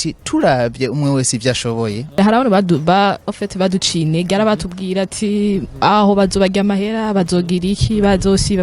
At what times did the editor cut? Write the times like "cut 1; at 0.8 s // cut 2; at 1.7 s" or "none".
cut 1; at 2.2 s

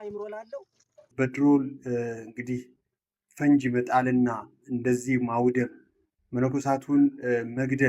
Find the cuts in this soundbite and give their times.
cut 1; at 1.0 s

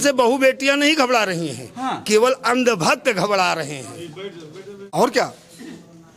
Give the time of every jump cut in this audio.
cut 1; at 4.9 s

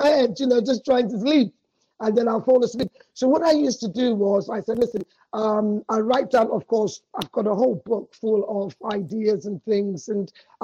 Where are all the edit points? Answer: none

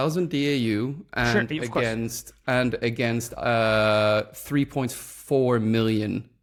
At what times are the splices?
none

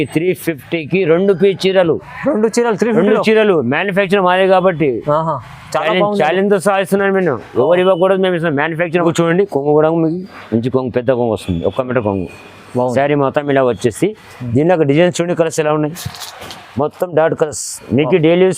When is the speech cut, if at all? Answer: cut 1; at 9.0 s

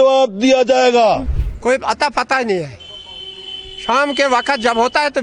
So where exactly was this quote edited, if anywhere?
cut 1; at 1.3 s

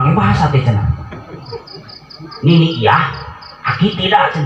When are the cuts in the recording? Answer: none

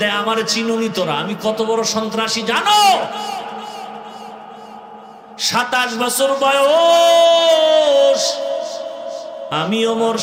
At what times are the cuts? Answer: none

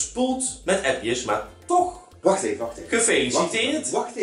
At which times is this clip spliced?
cut 1; at 2.1 s

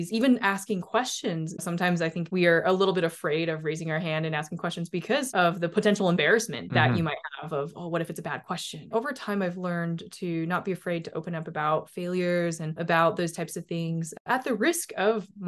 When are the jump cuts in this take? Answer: none

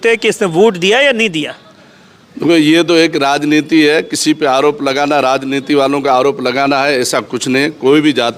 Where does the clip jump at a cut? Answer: none

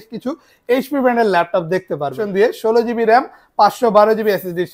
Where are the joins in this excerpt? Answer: cut 1; at 2.2 s

